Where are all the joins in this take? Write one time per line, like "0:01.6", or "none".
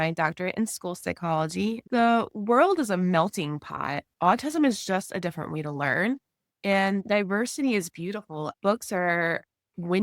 0:01.8
0:08.5